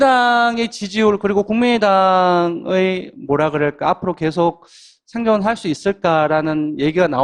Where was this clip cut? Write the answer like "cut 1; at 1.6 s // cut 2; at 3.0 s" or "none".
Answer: none